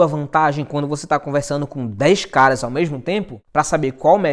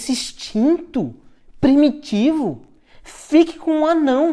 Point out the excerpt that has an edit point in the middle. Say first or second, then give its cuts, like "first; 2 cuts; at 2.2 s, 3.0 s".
first; 1 cut; at 3.4 s